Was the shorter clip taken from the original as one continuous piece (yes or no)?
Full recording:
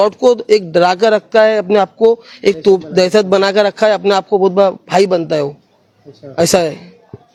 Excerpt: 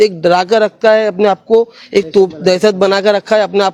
yes